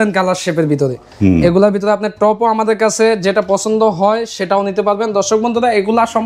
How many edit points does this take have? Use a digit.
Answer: 0